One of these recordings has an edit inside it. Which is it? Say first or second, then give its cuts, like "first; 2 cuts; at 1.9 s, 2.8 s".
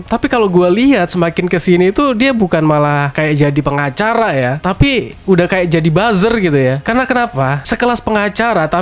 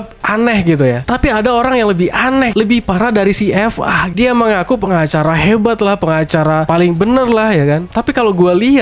second; 3 cuts; at 2.5 s, 4.1 s, 6.6 s